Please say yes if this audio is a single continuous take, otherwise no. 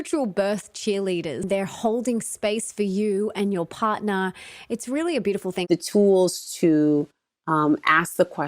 no